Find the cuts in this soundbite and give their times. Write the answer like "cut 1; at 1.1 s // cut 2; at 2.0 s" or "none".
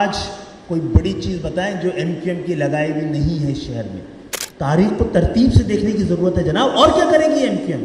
cut 1; at 4.1 s